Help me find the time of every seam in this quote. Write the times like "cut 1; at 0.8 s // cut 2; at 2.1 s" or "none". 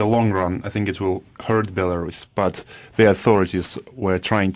none